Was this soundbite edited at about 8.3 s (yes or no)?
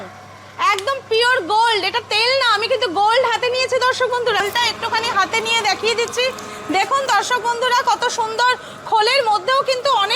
no